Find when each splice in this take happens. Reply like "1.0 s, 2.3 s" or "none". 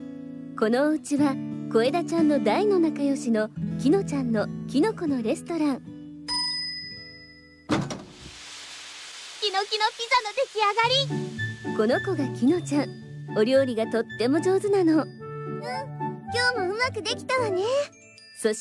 12.8 s